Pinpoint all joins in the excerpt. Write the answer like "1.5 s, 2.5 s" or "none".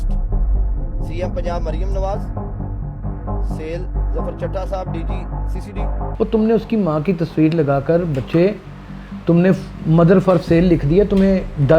6.0 s